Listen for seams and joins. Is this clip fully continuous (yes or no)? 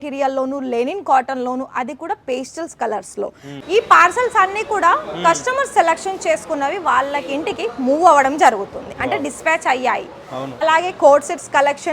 no